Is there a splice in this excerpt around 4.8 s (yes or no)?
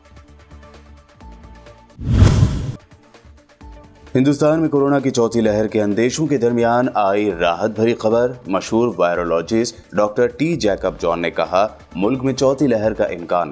no